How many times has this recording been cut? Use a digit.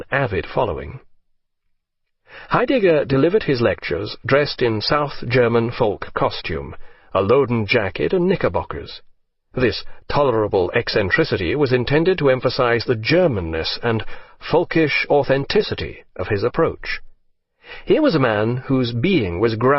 1